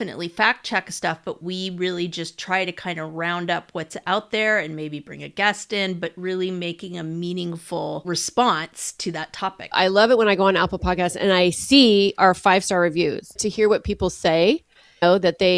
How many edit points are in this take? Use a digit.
3